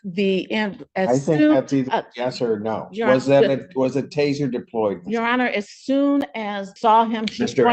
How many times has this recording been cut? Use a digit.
1